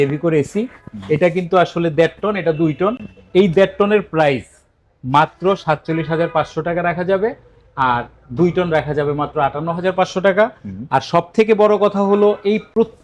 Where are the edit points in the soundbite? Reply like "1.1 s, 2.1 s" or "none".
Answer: none